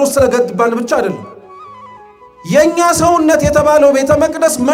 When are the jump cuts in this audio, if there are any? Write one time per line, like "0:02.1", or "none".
none